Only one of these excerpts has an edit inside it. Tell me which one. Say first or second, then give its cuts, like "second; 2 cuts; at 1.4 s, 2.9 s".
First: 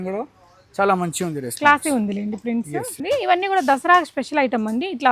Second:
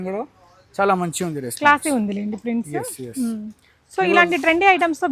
first; 1 cut; at 3.0 s